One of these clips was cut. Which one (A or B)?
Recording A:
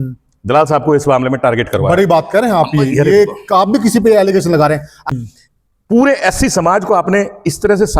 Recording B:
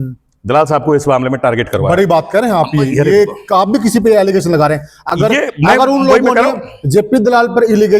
A